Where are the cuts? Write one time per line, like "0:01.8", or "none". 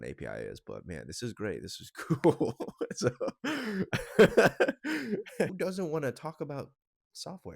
0:05.5